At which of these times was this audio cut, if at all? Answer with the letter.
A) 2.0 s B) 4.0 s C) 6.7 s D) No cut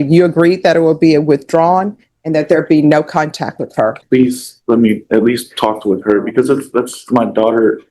B